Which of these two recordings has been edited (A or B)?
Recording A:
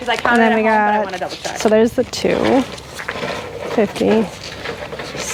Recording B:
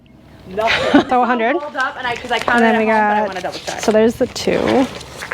B